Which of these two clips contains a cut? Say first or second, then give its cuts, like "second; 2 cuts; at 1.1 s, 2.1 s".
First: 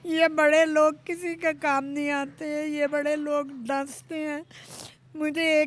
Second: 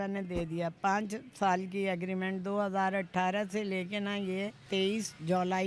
second; 1 cut; at 4.6 s